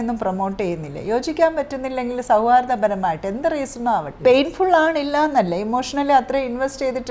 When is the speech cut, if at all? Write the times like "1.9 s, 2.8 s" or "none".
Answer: 4.1 s

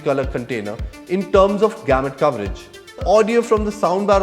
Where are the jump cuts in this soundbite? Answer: 3.0 s

